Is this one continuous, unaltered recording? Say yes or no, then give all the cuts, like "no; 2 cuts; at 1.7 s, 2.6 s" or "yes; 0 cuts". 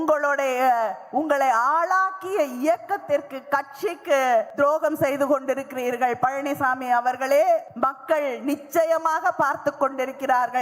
no; 2 cuts; at 4.5 s, 7.7 s